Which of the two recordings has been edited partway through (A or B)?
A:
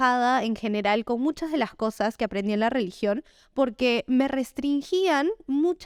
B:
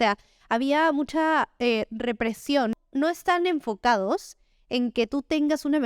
B